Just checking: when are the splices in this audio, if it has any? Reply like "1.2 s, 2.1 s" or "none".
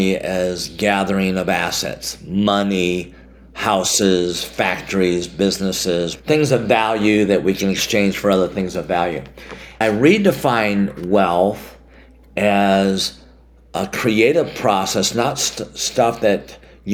6.1 s, 9.8 s